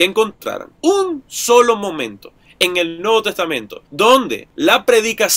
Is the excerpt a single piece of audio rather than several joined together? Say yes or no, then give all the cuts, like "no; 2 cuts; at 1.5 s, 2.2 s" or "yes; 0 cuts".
yes; 0 cuts